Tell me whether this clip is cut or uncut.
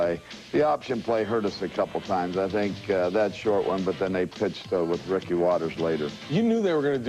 cut